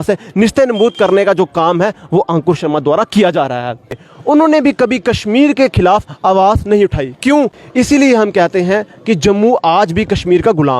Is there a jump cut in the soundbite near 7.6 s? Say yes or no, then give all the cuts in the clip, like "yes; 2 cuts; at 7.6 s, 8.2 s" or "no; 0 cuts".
yes; 2 cuts; at 4.1 s, 7.6 s